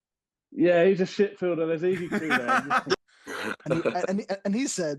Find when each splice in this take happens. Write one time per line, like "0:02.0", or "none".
0:02.9